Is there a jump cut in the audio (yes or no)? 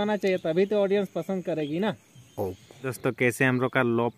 yes